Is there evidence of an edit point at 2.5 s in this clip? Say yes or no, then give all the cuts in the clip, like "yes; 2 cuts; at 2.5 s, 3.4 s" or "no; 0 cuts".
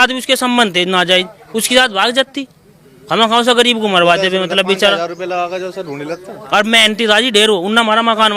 no; 0 cuts